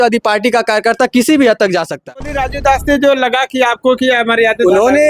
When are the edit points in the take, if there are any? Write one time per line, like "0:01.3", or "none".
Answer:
0:02.4